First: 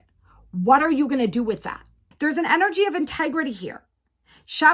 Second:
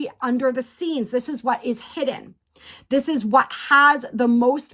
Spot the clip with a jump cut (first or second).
first